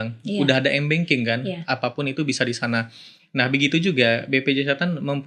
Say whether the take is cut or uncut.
uncut